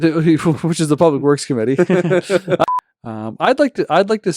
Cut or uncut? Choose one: cut